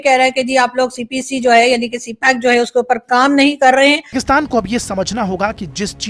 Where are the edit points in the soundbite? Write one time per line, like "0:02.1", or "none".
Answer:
0:04.2